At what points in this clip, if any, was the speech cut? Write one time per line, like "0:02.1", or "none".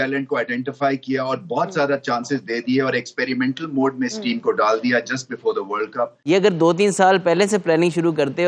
0:06.2